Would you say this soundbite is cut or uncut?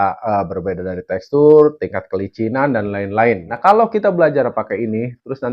uncut